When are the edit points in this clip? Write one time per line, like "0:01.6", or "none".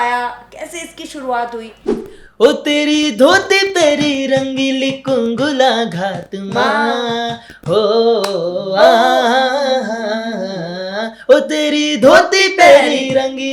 0:01.9

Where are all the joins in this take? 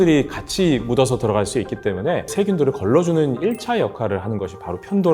0:02.3

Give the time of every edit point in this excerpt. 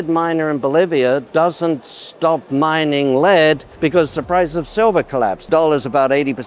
0:01.3
0:03.7
0:05.5

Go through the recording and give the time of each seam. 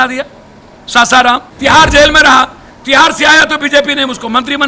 0:01.5

